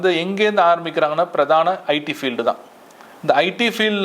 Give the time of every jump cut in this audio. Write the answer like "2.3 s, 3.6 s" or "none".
none